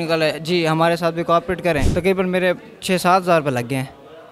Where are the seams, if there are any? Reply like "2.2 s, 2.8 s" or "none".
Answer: 1.9 s